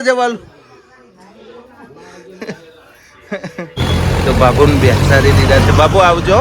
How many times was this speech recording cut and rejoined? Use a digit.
1